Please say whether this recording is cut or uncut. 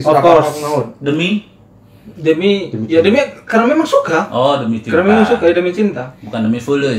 uncut